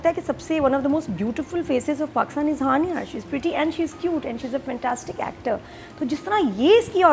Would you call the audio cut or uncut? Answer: uncut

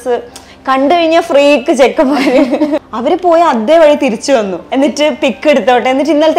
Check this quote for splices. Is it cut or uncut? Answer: cut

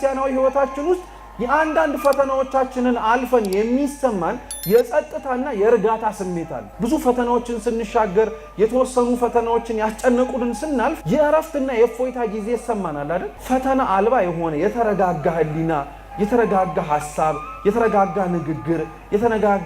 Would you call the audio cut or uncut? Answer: cut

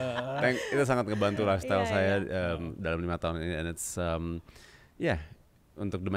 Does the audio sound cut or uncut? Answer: uncut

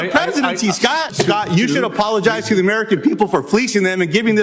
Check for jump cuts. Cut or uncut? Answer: cut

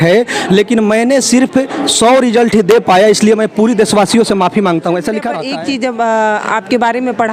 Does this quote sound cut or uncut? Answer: cut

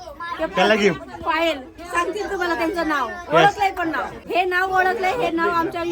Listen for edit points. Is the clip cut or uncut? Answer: cut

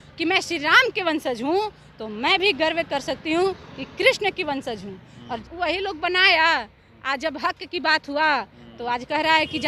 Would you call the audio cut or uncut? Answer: cut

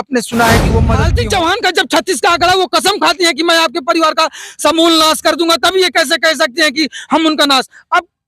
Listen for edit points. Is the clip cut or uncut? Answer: cut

